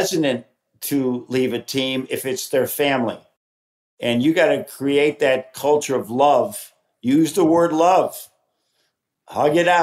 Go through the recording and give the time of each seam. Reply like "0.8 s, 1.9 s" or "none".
none